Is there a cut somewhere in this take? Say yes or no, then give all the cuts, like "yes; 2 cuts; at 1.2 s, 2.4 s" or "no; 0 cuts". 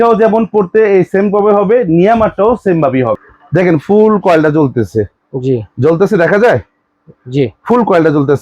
yes; 1 cut; at 3.2 s